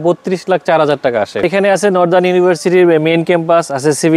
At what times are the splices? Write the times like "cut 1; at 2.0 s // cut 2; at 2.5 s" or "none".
cut 1; at 1.4 s